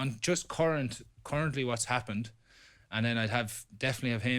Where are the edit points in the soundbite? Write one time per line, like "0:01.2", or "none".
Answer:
none